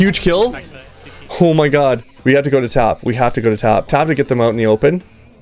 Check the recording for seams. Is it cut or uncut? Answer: cut